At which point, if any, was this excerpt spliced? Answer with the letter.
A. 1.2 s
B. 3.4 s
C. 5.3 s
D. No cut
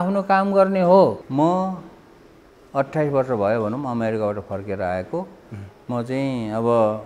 A